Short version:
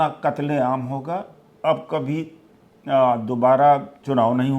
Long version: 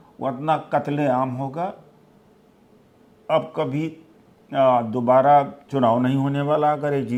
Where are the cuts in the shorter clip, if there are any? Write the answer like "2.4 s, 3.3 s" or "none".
1.4 s